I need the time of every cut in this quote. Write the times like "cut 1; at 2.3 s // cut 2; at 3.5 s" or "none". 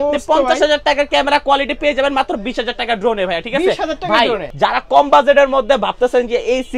cut 1; at 4.5 s